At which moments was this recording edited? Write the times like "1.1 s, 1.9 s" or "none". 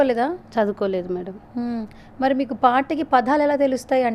none